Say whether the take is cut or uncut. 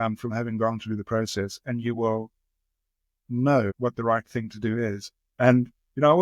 cut